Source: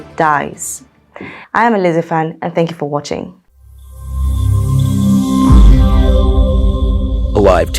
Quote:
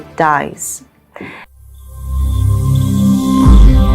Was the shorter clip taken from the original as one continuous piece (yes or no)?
no